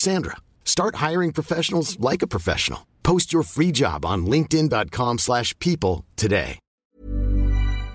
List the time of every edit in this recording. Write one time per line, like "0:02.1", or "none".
0:06.6